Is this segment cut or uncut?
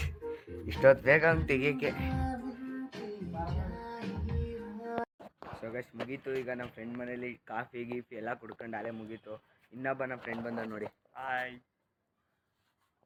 uncut